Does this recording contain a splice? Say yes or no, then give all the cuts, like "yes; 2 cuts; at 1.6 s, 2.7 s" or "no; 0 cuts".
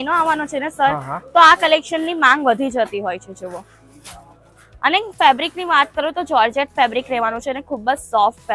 no; 0 cuts